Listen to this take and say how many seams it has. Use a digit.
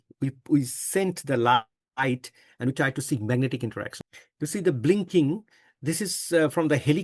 1